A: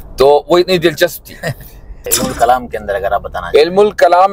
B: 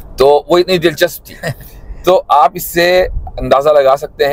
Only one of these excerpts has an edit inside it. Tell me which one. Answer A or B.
A